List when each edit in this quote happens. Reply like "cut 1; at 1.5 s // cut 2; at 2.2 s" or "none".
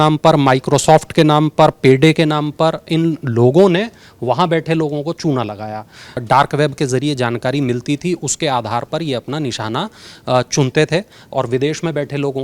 cut 1; at 6.2 s